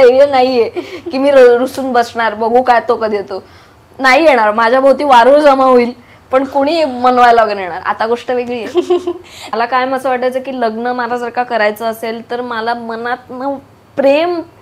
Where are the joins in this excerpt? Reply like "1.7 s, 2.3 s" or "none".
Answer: 9.5 s